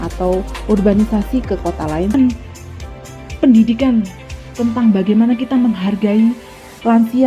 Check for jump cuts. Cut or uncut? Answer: cut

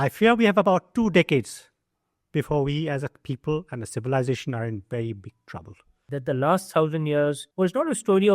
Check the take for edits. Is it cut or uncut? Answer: cut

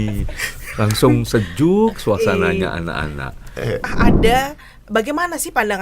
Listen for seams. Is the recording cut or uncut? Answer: cut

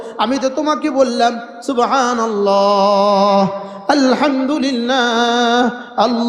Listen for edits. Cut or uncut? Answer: uncut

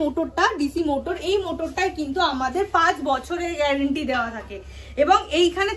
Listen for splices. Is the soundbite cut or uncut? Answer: uncut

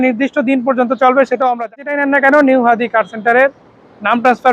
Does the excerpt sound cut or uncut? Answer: cut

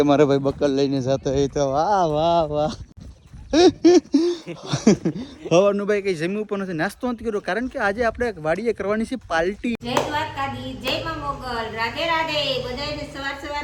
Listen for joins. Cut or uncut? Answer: uncut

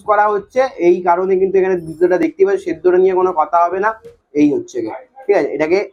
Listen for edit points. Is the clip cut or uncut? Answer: uncut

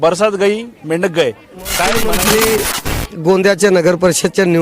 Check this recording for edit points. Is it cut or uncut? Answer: cut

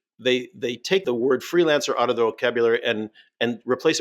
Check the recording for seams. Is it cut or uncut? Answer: cut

